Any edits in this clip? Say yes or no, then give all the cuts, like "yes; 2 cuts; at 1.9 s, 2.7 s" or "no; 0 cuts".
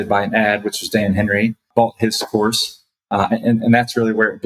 yes; 1 cut; at 1.7 s